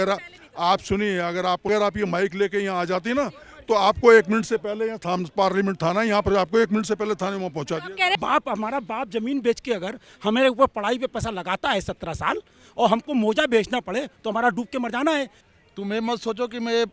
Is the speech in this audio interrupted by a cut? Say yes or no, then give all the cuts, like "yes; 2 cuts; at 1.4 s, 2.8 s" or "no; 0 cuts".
yes; 3 cuts; at 1.7 s, 8.1 s, 15.4 s